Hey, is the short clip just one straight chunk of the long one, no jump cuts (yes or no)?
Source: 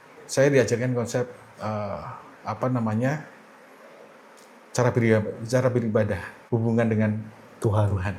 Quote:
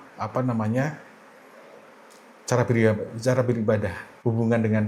yes